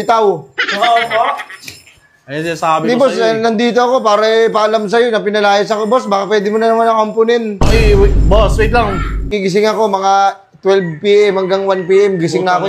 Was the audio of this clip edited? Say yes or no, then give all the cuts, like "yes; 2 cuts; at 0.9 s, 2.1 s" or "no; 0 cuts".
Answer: yes; 1 cut; at 9.3 s